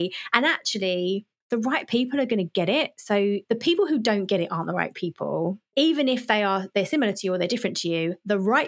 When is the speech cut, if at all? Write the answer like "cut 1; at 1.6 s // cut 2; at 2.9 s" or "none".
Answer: cut 1; at 1.3 s // cut 2; at 3.4 s // cut 3; at 5.7 s